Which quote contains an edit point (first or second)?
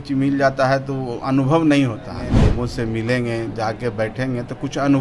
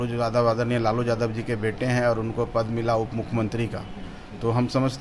first